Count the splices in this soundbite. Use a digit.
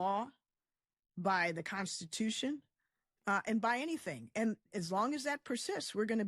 1